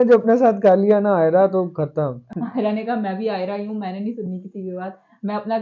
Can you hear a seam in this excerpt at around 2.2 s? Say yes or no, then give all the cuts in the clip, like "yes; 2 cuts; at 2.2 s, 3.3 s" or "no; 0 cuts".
yes; 1 cut; at 2.2 s